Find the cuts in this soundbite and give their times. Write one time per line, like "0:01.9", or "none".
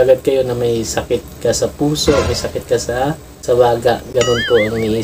none